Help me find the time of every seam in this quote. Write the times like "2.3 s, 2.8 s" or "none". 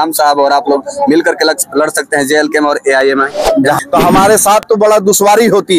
3.8 s